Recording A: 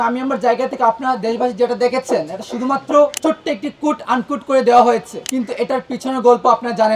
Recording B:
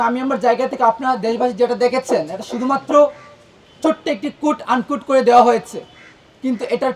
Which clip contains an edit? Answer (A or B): A